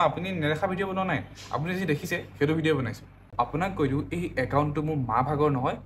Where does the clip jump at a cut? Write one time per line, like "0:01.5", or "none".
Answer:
0:03.3